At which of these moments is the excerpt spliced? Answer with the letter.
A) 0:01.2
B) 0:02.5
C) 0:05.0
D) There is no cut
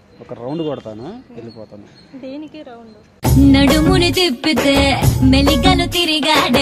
D